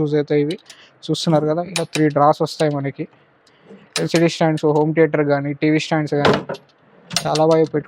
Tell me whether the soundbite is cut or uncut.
uncut